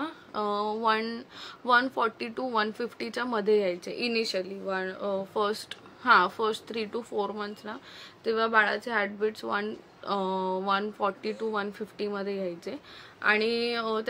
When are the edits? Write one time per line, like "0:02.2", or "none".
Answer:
none